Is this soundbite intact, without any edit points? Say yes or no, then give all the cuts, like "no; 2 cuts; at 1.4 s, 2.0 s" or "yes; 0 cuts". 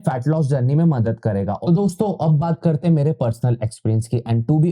no; 1 cut; at 1.6 s